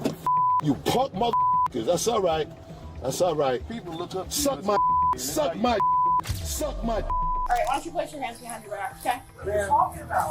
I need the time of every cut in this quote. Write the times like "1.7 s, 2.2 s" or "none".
7.4 s